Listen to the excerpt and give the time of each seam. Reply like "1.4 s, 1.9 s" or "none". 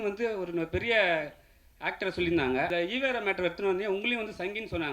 2.7 s